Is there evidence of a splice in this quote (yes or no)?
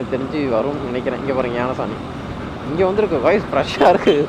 no